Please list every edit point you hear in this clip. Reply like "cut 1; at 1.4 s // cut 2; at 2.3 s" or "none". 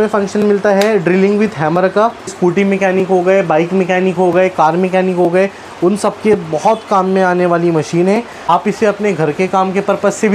cut 1; at 2.3 s // cut 2; at 8.5 s